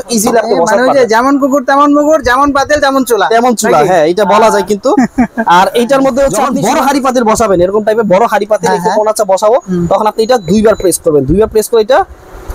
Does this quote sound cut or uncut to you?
cut